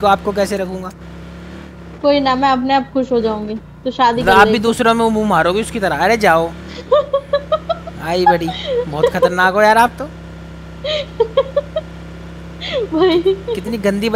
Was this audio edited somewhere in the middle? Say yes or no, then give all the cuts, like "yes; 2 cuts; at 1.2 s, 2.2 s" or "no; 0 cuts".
no; 0 cuts